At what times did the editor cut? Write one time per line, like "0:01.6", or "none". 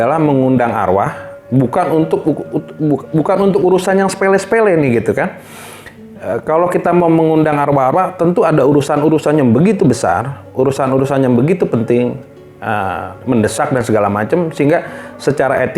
none